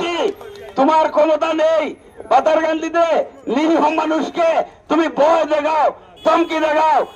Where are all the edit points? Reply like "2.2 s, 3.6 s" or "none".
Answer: none